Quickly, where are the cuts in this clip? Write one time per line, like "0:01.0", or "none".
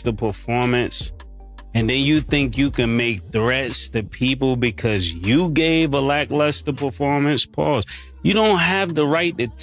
none